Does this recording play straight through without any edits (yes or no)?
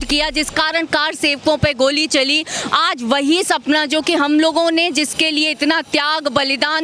yes